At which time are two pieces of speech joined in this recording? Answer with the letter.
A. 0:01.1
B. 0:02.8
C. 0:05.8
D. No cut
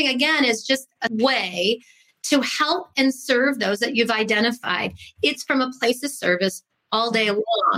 A